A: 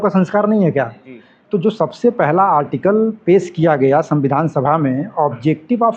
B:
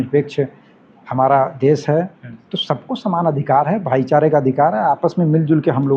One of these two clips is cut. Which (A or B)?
A